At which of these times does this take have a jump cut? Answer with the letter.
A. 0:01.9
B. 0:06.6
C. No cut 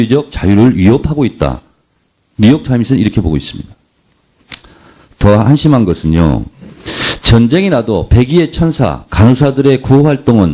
A